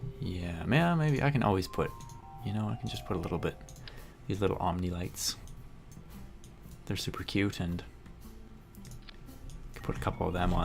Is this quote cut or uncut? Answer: uncut